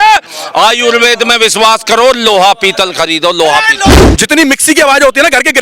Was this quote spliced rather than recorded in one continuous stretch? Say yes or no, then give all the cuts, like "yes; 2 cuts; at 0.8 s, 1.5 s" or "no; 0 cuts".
yes; 1 cut; at 3.9 s